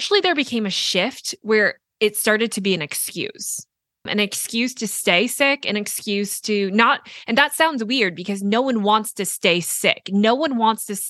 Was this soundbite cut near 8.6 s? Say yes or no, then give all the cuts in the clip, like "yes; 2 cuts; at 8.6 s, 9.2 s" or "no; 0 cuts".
no; 1 cut; at 4.1 s